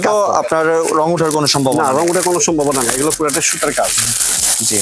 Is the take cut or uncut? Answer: uncut